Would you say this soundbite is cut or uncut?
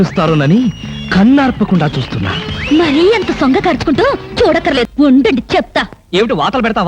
cut